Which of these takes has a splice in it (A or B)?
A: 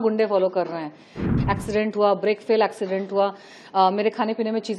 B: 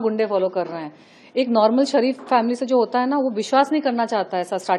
A